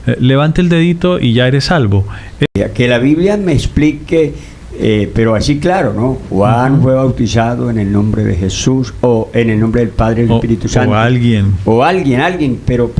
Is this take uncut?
no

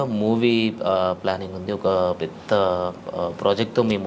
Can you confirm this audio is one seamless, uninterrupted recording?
yes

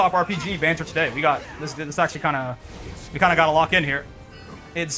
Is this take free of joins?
yes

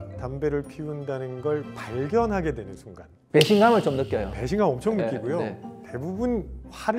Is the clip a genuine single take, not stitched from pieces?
yes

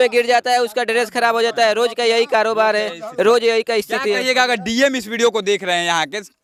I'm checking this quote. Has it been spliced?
no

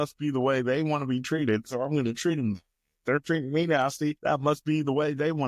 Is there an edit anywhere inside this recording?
yes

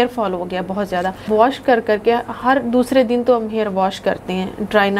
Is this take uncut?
no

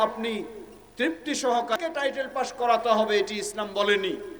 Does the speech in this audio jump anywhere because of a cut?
yes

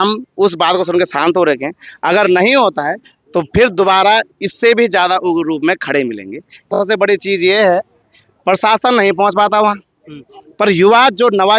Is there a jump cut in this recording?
yes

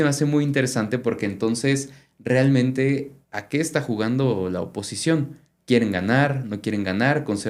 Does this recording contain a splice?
no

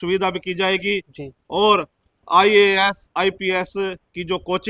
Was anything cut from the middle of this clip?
no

